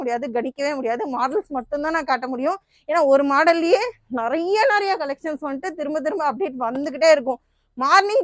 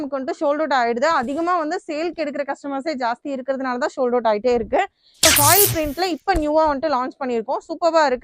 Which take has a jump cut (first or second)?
second